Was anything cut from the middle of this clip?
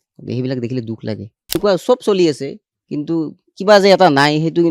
yes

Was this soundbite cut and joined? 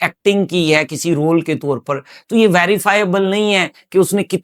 no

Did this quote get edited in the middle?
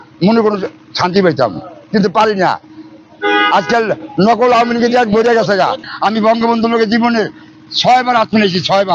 no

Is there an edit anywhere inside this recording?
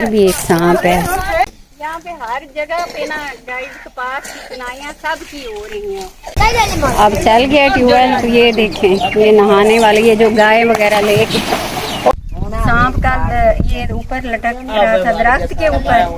yes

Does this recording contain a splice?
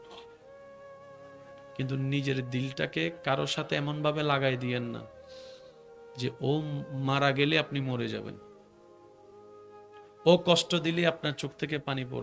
yes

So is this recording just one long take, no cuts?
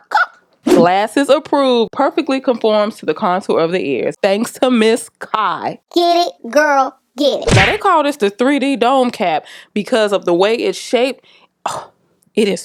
yes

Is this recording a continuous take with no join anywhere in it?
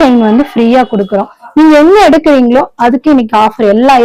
yes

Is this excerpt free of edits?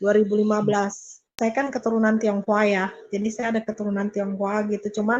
no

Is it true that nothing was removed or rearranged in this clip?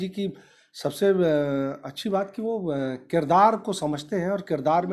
yes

